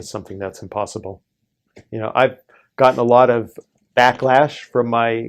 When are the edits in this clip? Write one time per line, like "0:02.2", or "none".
0:01.7